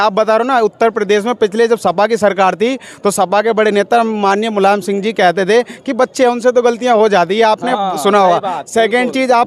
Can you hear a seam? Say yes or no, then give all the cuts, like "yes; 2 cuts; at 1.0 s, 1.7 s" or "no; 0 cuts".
no; 0 cuts